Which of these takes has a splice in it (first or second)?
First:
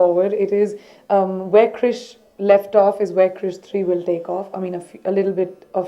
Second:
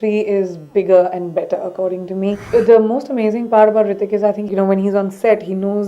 second